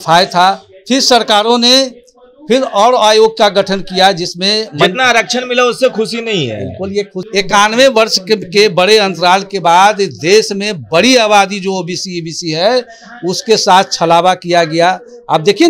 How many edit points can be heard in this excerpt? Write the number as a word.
one